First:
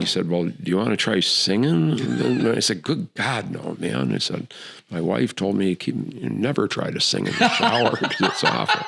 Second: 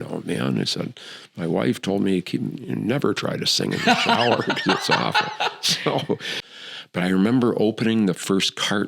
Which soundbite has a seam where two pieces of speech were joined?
second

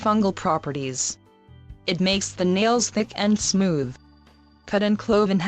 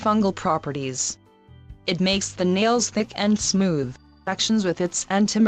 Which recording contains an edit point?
first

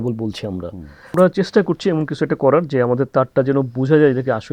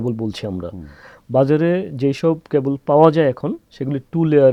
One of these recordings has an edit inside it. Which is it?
first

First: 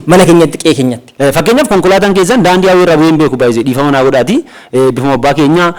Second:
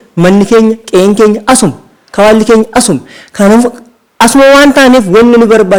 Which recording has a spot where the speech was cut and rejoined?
first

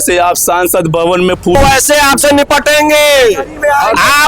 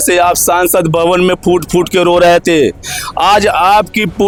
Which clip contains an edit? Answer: first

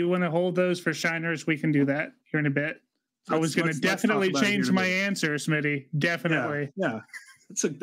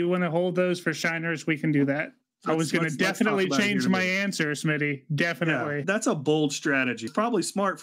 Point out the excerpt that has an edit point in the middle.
second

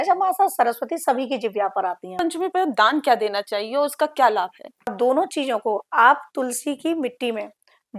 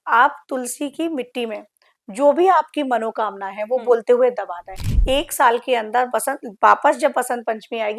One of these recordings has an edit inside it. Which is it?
first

